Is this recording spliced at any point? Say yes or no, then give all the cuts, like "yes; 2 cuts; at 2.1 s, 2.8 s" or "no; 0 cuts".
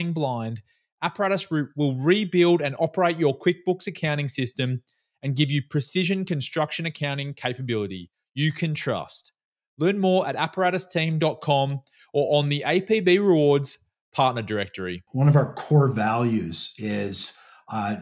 yes; 1 cut; at 15.0 s